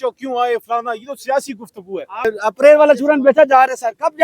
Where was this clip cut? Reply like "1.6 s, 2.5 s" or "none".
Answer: 2.3 s

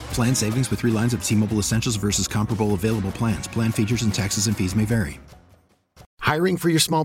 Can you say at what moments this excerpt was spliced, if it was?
6.0 s

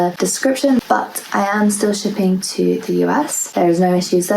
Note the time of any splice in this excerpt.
0.7 s, 3.4 s

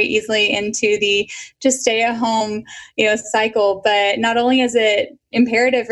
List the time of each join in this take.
2.4 s

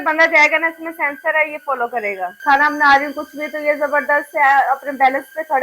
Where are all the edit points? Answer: 2.3 s

